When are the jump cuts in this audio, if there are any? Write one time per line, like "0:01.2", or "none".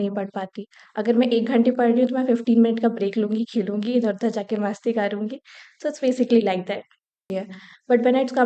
0:07.2